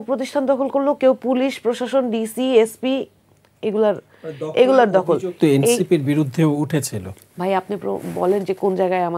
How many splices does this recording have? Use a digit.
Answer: 0